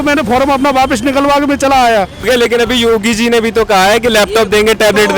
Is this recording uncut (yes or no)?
no